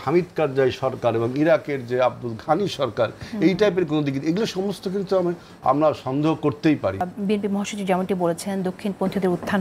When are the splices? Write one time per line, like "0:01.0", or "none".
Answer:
0:07.1